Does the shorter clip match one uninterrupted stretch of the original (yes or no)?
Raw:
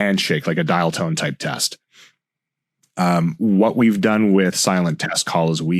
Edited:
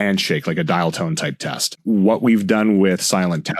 no